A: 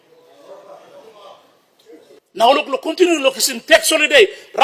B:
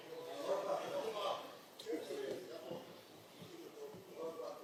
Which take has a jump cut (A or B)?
A